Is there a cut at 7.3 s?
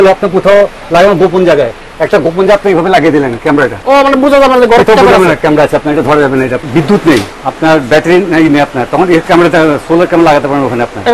yes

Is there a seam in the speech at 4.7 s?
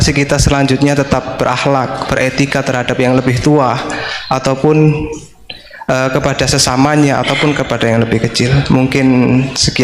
no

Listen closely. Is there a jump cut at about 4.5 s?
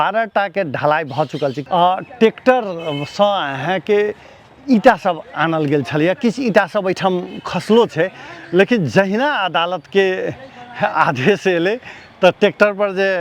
no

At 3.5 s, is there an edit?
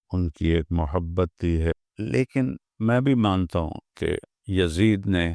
no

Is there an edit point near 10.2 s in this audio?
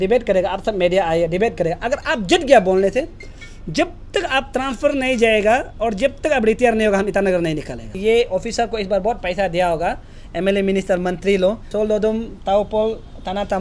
no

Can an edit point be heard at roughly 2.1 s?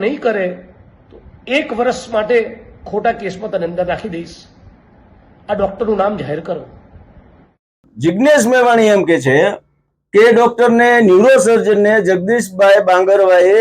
no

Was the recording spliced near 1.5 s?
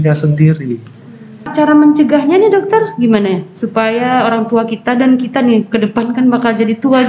yes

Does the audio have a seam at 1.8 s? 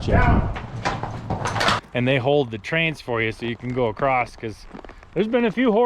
yes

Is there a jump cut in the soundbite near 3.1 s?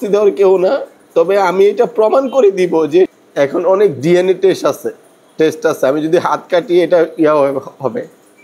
yes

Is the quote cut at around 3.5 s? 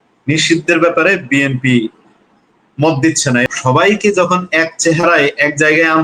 yes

